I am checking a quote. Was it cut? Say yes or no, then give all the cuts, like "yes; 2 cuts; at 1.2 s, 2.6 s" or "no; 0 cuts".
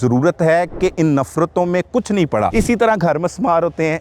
yes; 1 cut; at 2.5 s